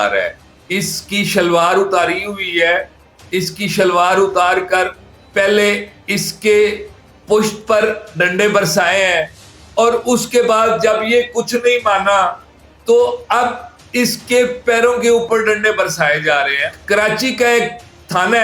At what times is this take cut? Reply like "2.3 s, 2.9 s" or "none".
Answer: 16.7 s